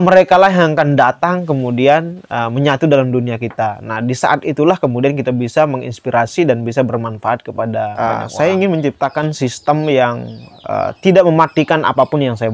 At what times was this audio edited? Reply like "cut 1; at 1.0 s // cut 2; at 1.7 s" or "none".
cut 1; at 7.9 s